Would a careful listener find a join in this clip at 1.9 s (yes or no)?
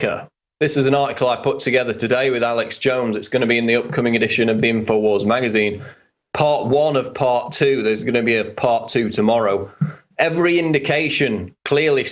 no